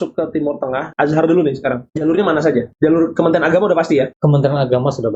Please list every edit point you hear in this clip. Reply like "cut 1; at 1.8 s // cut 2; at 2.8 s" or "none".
cut 1; at 0.9 s // cut 2; at 1.9 s // cut 3; at 2.7 s // cut 4; at 4.1 s